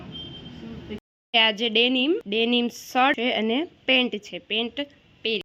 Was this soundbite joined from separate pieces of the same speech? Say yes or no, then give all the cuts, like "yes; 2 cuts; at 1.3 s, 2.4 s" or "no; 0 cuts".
yes; 3 cuts; at 1.0 s, 2.2 s, 3.2 s